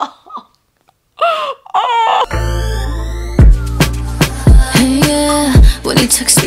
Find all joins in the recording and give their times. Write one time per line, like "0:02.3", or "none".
0:02.6